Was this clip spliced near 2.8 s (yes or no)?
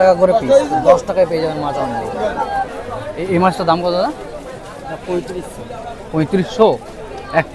yes